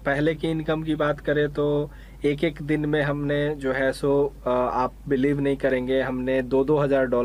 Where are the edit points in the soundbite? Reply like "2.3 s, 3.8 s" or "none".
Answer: none